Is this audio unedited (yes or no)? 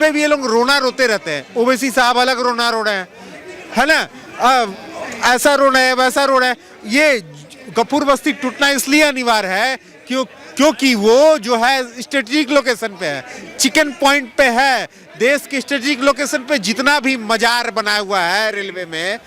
yes